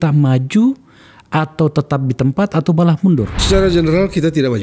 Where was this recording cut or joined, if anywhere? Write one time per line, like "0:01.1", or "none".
0:03.4